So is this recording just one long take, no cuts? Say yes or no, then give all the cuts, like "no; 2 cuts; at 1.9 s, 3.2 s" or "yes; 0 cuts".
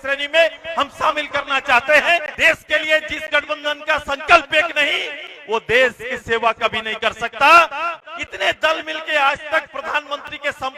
no; 2 cuts; at 2.3 s, 7.9 s